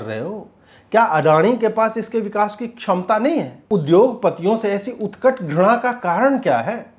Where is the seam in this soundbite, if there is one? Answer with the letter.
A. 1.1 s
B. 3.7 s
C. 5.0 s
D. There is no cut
B